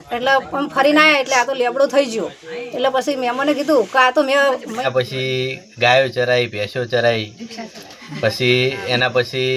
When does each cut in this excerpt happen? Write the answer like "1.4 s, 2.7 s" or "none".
4.9 s